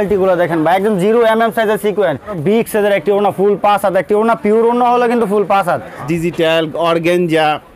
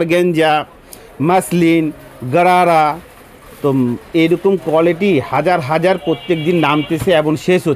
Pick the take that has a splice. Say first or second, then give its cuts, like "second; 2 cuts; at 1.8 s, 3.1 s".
first; 2 cuts; at 2.3 s, 6.0 s